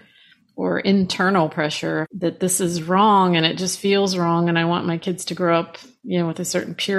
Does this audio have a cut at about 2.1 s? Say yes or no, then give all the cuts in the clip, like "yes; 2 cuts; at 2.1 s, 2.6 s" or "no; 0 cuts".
yes; 1 cut; at 2.1 s